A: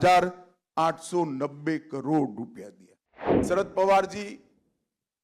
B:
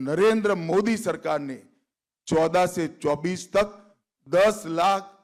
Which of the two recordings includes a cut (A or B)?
A